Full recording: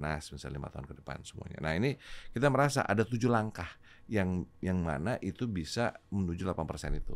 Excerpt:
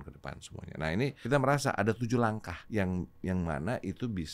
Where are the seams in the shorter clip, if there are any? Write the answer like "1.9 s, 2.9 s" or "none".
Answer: 1.2 s, 2.5 s